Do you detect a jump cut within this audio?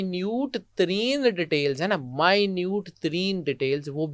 no; 0 cuts

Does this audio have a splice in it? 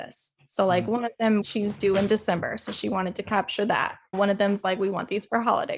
yes; 1 cut; at 1.4 s

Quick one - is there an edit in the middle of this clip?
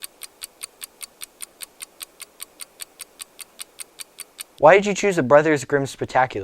yes; 1 cut; at 4.4 s

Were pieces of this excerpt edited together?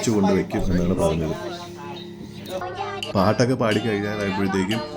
yes; 1 cut; at 2.6 s

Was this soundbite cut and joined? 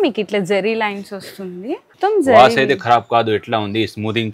yes; 1 cut; at 1.8 s

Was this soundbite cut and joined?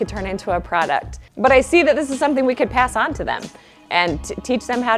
no; 0 cuts

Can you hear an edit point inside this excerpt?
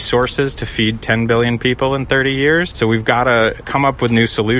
yes; 2 cuts; at 2.7 s, 3.6 s

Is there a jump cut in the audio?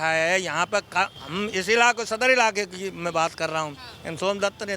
yes; 1 cut; at 1.2 s

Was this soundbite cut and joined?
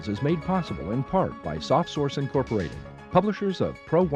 no; 0 cuts

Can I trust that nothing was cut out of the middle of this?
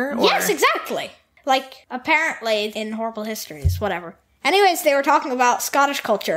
no; 3 cuts; at 1.2 s, 1.8 s, 2.7 s

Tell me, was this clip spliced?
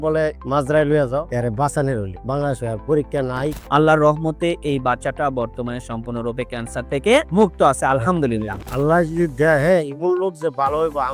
yes; 3 cuts; at 1.3 s, 3.6 s, 8.6 s

